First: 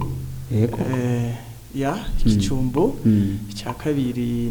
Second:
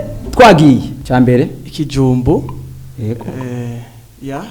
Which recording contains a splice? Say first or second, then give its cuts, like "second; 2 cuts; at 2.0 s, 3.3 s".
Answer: second; 1 cut; at 0.9 s